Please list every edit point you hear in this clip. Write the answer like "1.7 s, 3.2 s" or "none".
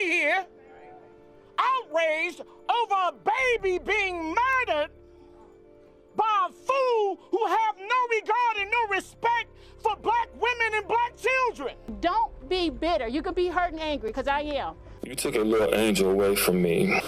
11.8 s, 15.1 s